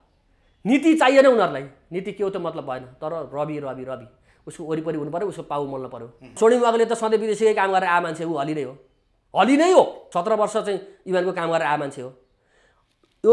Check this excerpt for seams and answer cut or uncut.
cut